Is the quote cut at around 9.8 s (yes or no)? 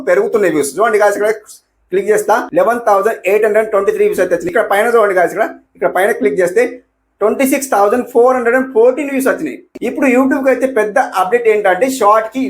yes